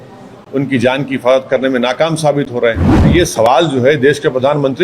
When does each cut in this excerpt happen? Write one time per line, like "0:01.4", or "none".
0:02.9